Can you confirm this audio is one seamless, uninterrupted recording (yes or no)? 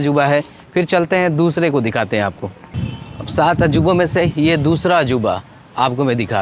yes